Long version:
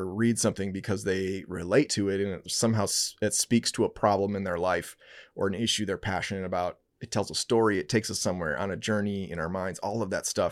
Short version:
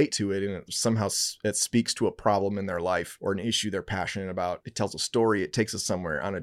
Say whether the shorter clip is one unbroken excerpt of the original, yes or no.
no